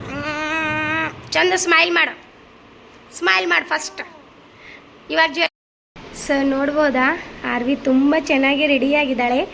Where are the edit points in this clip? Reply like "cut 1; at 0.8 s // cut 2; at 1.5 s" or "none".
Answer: cut 1; at 5.5 s